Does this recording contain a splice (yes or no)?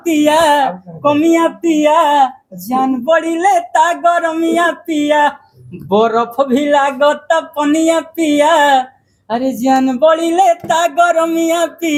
no